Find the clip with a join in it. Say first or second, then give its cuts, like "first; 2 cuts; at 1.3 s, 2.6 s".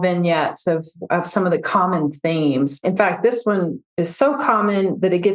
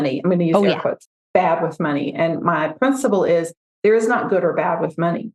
first; 1 cut; at 2.8 s